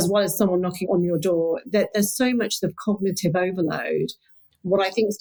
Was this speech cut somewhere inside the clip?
no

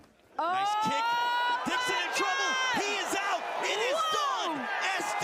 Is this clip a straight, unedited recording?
yes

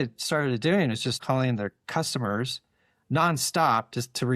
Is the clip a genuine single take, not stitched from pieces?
no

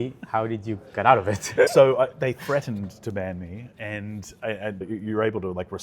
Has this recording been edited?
yes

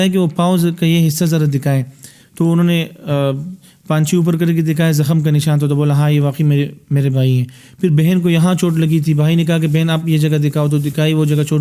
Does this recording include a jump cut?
no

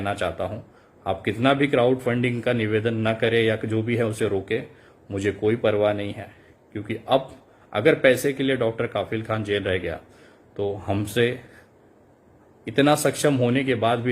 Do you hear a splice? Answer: no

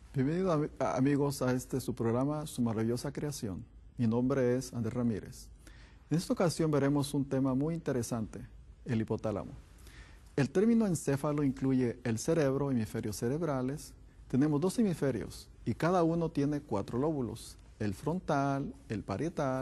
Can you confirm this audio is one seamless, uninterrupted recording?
no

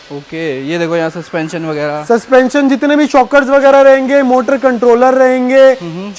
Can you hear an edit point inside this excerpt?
no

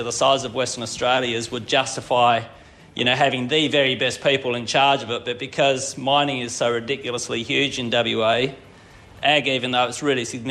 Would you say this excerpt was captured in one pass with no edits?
yes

